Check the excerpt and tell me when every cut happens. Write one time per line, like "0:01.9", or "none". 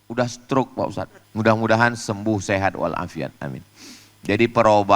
0:01.2

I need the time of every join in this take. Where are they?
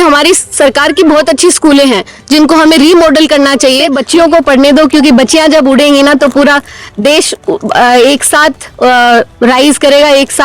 0:04.0

